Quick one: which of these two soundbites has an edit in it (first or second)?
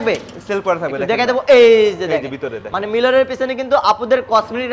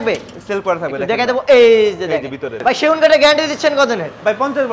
second